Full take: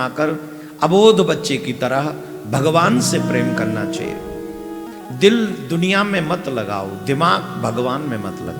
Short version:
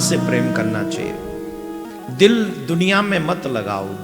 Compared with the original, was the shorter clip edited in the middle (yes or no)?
no